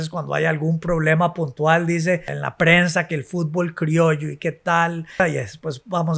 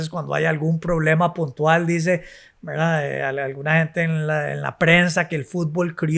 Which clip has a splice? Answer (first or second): first